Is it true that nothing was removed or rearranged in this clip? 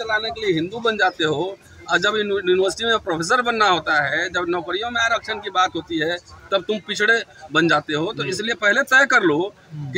yes; 0 cuts

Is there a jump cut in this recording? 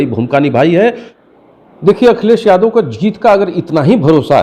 yes; 1 cut; at 1.1 s

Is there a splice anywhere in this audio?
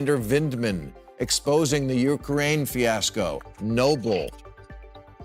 yes; 1 cut; at 4.3 s

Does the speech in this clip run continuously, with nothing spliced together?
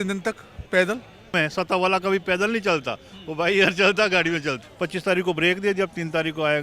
no; 2 cuts; at 1.3 s, 4.6 s

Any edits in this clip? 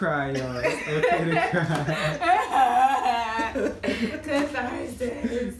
no; 0 cuts

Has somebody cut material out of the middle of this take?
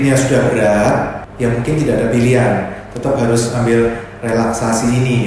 yes; 1 cut; at 1.2 s

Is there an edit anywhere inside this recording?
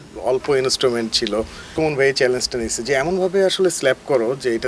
yes; 1 cut; at 1.6 s

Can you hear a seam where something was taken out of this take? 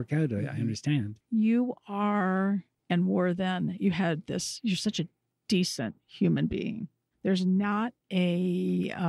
yes; 3 cuts; at 1.2 s, 5.2 s, 8.0 s

